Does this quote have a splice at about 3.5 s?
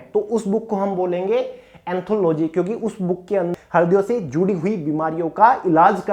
yes; 1 cut; at 3.5 s

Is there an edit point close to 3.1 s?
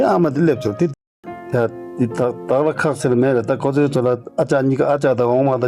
no; 1 cut; at 0.9 s

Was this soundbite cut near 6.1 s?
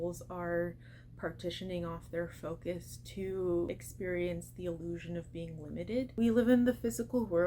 yes; 2 cuts; at 3.8 s, 6.1 s

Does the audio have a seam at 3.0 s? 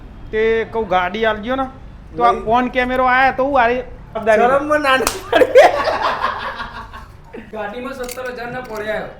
no; 2 cuts; at 4.2 s, 7.4 s

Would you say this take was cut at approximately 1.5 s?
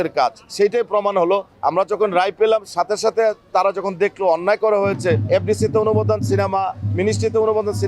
yes; 2 cuts; at 1.5 s, 5.2 s

